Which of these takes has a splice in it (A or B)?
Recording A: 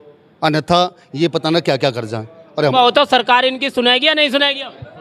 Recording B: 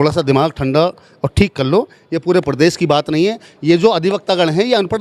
A